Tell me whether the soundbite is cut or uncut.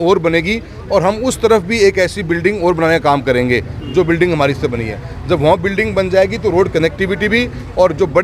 uncut